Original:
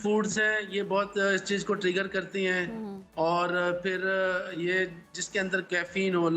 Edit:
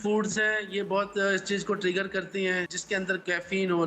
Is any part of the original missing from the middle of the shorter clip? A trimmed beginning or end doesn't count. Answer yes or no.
yes